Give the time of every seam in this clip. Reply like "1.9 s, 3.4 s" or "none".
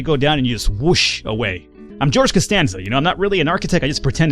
1.7 s